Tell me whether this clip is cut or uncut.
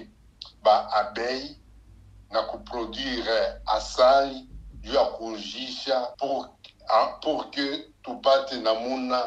cut